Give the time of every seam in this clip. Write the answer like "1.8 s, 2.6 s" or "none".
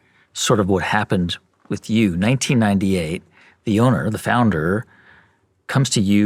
none